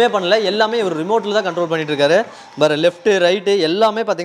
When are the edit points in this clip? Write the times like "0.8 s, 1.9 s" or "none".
none